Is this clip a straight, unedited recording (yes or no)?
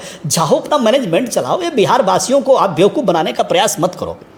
yes